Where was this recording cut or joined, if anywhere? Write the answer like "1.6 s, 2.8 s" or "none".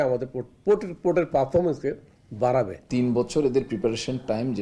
2.8 s